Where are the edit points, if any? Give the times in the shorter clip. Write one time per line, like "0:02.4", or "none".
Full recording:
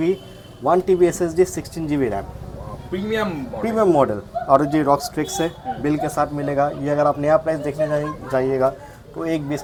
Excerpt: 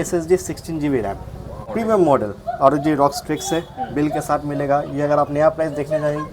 0:01.6

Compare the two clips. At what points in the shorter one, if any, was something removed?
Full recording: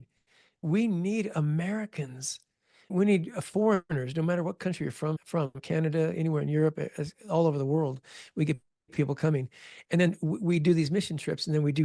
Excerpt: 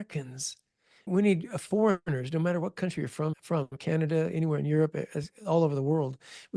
none

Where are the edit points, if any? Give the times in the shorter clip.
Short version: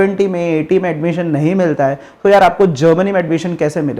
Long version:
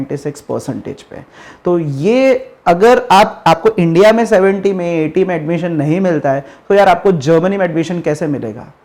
none

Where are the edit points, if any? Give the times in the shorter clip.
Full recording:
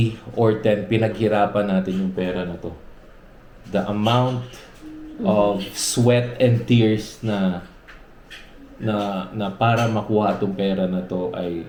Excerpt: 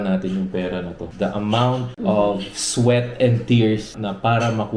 0:01.0
0:01.9
0:03.9

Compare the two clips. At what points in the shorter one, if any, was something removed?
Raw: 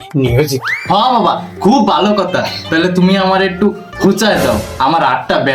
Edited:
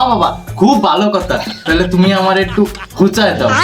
none

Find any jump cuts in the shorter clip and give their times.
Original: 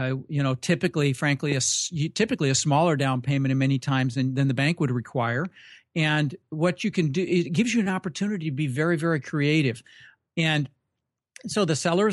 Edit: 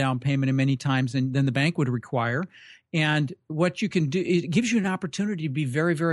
none

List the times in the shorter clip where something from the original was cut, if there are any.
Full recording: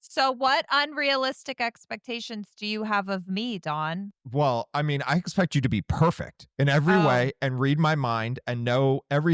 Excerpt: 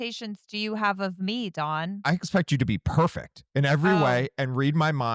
0:02.0

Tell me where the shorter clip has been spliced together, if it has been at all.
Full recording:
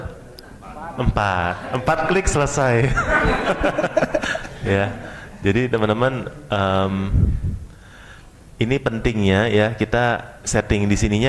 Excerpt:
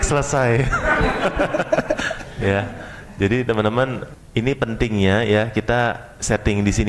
0:04.1

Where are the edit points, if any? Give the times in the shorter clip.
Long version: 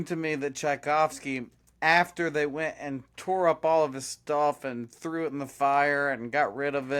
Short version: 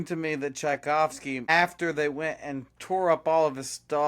0:01.4

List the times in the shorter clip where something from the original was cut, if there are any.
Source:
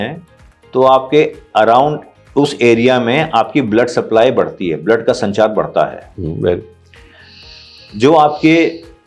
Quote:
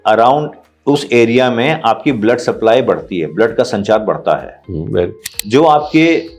0:05.3

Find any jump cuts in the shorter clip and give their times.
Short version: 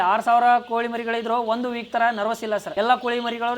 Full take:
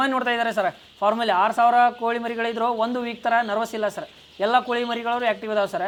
0:02.7

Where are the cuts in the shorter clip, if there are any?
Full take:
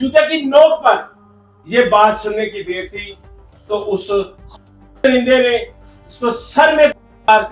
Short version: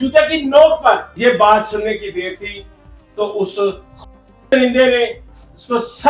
0:01.1

